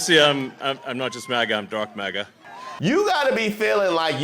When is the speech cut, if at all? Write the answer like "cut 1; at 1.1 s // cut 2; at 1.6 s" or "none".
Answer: cut 1; at 2.7 s